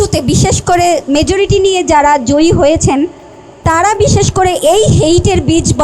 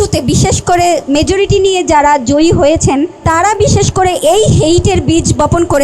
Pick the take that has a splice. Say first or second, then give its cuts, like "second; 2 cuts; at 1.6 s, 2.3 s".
second; 1 cut; at 3.2 s